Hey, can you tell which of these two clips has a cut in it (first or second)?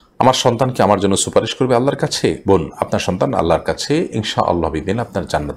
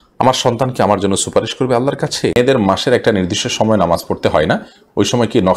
second